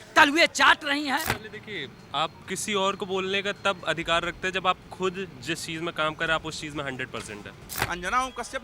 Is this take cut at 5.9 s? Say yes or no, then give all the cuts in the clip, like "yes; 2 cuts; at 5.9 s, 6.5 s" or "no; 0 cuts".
no; 2 cuts; at 1.3 s, 7.7 s